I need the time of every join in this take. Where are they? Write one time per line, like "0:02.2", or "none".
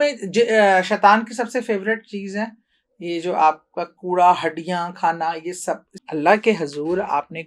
0:05.9